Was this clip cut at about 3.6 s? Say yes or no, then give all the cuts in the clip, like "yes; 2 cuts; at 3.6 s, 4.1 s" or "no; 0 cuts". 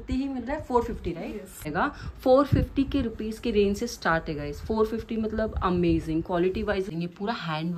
no; 2 cuts; at 1.7 s, 6.9 s